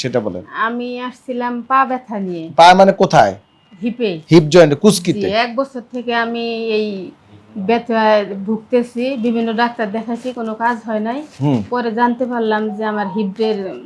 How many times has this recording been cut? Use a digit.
0